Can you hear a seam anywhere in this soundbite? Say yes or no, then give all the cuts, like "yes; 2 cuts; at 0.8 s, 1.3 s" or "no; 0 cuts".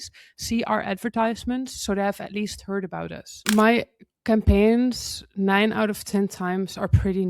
yes; 1 cut; at 3.5 s